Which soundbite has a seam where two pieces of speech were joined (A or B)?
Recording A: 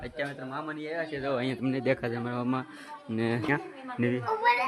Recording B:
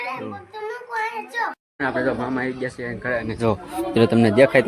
A